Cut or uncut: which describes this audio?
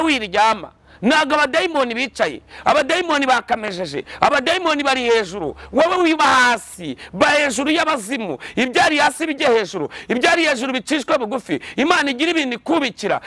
uncut